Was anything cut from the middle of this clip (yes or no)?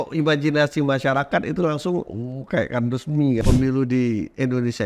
yes